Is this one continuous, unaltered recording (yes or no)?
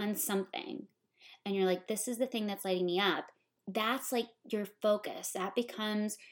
no